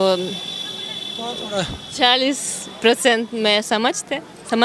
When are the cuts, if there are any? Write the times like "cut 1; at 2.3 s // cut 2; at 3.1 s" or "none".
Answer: none